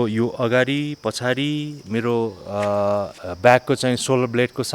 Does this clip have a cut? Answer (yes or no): yes